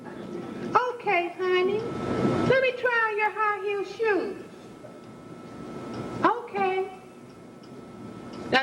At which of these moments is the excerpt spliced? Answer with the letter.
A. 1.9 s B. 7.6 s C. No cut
A